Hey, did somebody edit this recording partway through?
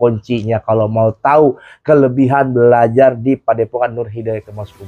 no; 0 cuts

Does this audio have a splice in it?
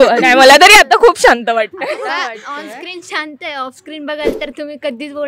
no; 0 cuts

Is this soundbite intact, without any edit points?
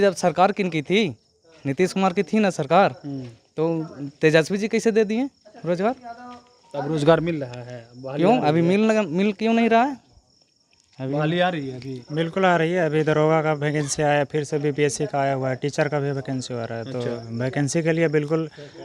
yes; 0 cuts

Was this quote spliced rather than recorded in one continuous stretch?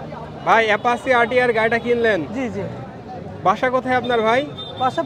no; 0 cuts

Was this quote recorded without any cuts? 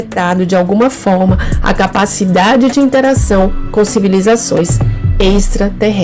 yes; 0 cuts

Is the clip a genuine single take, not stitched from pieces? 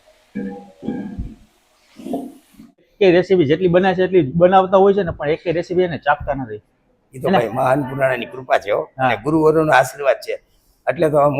no; 1 cut; at 2.8 s

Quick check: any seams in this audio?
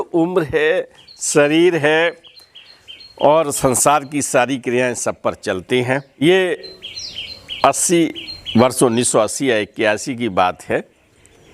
yes; 1 cut; at 6.2 s

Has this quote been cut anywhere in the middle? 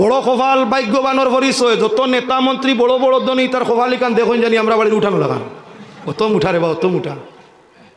no; 0 cuts

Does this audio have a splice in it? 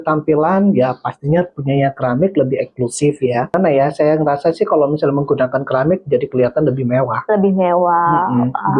yes; 1 cut; at 3.5 s

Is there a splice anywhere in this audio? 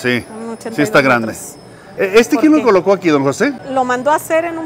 yes; 2 cuts; at 1.9 s, 3.6 s

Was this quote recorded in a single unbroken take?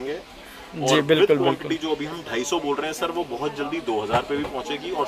yes; 0 cuts

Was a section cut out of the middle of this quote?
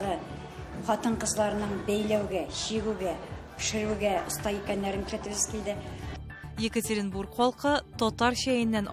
no; 0 cuts

